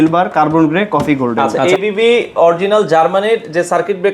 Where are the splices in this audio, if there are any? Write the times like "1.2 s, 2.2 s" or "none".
1.5 s